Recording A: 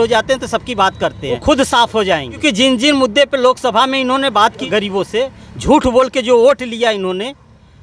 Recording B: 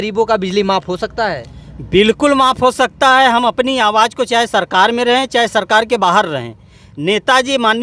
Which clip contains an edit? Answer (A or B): A